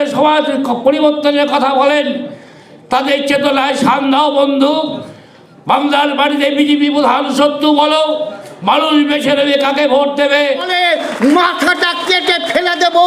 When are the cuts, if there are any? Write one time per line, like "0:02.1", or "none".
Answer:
0:10.7